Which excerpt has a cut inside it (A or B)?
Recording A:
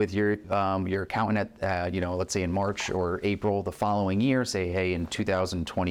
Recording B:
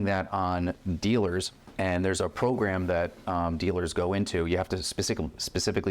B